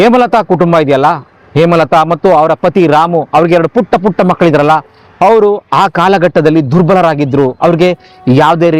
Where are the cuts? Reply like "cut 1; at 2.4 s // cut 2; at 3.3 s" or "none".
none